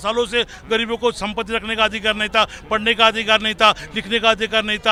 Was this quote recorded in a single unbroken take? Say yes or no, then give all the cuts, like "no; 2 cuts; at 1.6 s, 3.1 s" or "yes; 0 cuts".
yes; 0 cuts